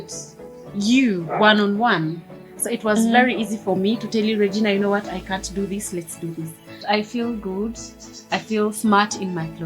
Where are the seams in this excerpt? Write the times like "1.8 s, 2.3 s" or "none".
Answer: 6.7 s